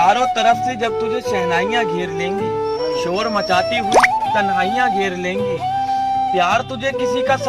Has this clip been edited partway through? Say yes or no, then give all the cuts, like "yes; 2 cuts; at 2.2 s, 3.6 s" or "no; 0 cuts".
no; 0 cuts